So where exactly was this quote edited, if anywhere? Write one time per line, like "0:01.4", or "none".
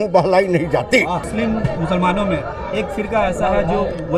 0:01.3